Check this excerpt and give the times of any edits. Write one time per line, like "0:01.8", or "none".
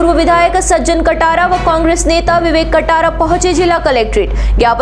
none